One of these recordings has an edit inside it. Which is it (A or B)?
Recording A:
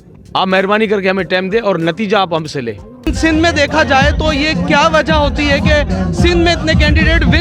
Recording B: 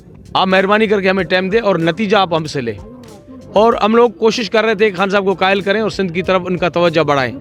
A